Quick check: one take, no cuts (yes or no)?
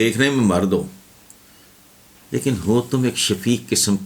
yes